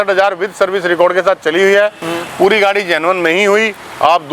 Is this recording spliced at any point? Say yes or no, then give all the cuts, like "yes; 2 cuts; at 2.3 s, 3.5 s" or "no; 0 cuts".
no; 0 cuts